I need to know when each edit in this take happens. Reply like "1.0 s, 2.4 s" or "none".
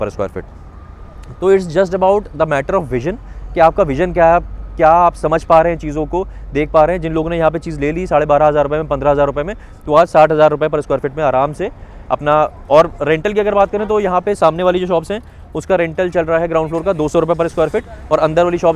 none